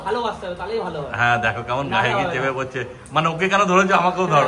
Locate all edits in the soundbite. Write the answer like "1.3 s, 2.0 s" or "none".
none